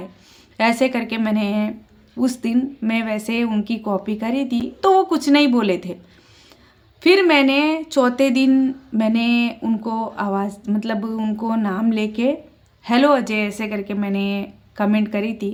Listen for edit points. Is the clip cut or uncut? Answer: uncut